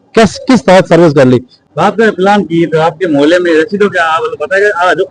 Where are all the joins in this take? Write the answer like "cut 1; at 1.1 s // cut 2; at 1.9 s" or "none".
cut 1; at 1.5 s